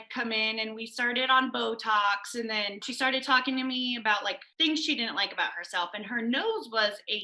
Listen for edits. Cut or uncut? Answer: cut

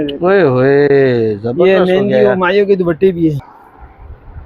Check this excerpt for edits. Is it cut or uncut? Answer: cut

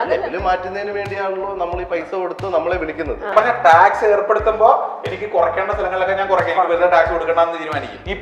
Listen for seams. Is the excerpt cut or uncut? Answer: cut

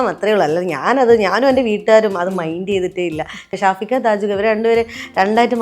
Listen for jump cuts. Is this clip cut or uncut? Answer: cut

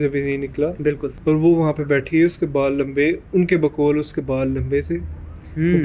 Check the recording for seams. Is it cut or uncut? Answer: cut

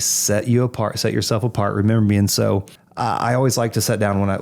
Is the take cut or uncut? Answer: cut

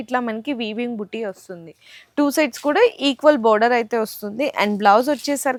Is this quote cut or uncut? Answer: uncut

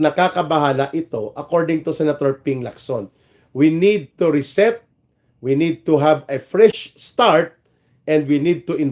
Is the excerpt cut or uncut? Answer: uncut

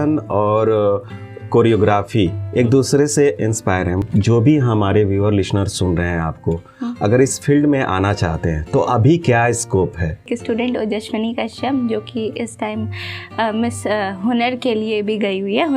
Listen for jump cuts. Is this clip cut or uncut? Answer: cut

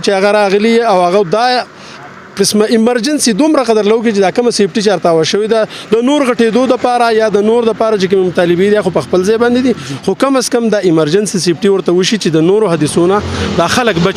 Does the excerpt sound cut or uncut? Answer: uncut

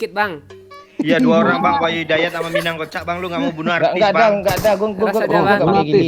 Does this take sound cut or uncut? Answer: uncut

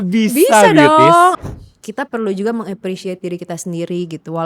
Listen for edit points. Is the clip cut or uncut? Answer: cut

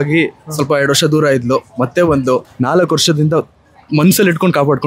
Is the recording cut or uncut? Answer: cut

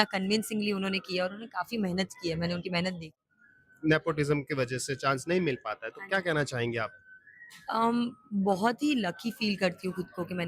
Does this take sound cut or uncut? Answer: cut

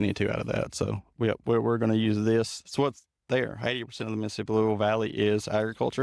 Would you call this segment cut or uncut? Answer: uncut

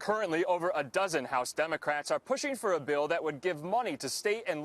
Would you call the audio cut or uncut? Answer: uncut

